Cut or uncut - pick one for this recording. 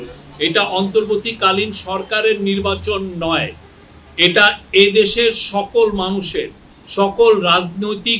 uncut